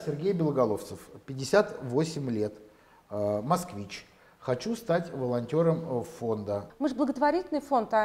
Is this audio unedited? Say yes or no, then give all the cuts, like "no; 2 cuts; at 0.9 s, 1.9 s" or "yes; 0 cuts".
no; 1 cut; at 6.7 s